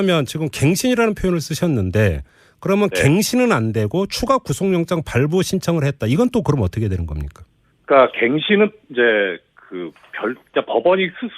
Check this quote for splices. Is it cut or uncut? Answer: cut